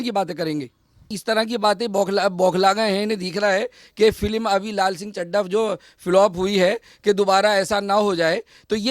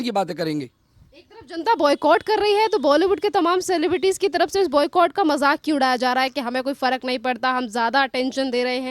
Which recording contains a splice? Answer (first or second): first